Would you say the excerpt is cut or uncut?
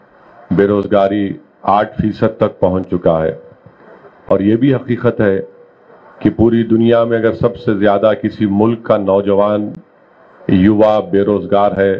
uncut